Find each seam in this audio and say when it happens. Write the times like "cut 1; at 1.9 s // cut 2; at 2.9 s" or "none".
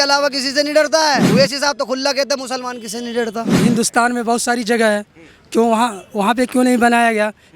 cut 1; at 1.2 s // cut 2; at 3.6 s